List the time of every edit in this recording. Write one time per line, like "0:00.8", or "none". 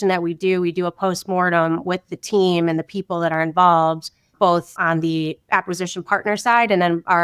0:04.8

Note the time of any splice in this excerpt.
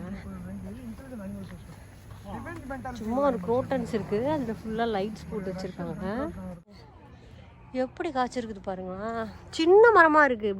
0:06.7

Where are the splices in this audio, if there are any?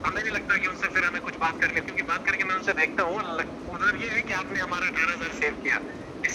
none

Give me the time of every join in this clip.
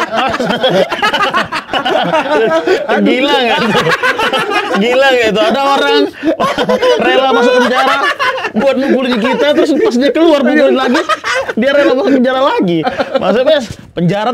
0:12.8

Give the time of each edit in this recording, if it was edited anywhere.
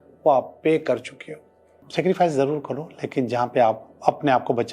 0:01.8

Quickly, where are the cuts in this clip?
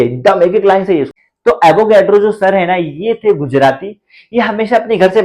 0:01.2

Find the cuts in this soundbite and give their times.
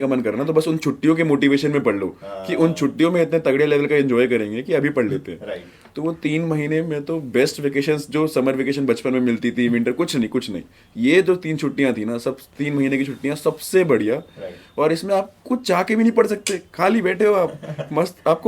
none

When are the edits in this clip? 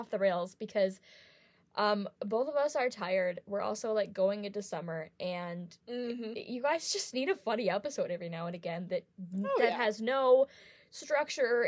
none

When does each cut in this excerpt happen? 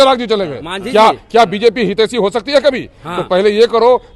none

